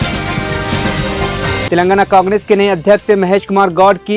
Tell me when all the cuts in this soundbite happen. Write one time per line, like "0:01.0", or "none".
0:01.7

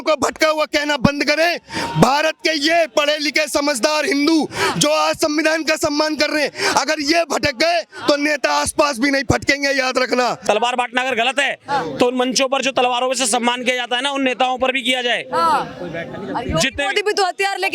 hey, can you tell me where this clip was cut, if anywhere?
0:10.4

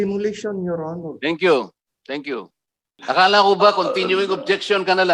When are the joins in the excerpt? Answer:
0:03.0

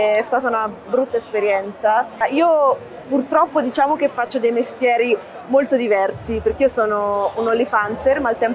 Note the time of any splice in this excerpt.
0:02.2

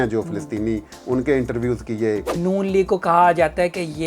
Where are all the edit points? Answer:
0:02.4

